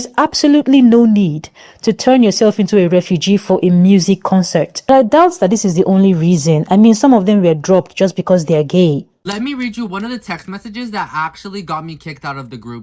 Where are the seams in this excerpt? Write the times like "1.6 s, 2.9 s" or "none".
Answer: 4.9 s, 9.1 s